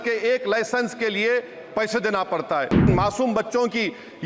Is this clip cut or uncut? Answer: cut